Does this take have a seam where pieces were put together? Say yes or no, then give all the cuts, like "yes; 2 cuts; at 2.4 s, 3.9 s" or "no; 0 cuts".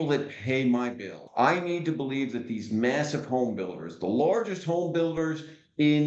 yes; 1 cut; at 1.2 s